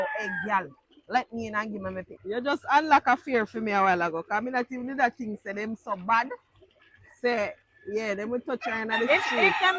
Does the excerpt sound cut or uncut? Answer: cut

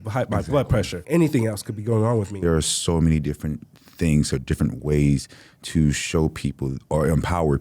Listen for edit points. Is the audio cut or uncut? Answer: cut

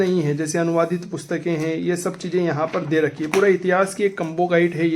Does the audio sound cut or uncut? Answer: uncut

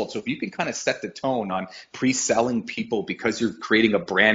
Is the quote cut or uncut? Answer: uncut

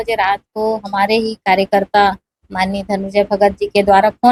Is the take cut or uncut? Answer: uncut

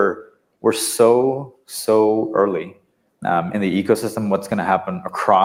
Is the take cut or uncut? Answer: uncut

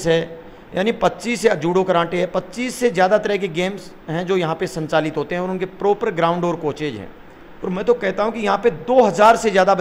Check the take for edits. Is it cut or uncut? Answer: uncut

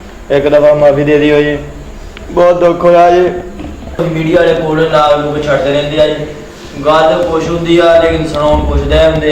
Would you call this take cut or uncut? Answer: cut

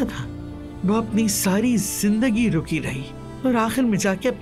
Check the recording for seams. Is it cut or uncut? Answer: uncut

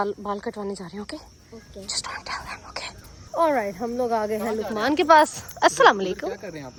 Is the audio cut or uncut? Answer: uncut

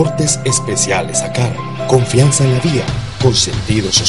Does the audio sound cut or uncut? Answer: uncut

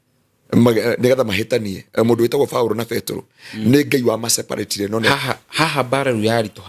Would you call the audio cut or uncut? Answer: cut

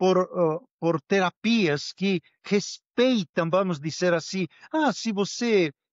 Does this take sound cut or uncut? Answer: uncut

